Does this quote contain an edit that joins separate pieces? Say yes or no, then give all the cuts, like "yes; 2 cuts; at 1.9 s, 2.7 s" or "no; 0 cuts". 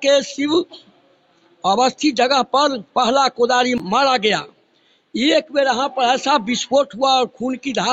yes; 1 cut; at 3.8 s